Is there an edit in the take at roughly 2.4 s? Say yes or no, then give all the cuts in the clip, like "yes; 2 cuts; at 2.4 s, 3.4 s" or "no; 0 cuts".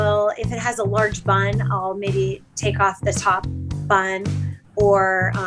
no; 0 cuts